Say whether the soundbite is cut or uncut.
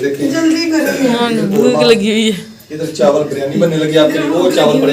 uncut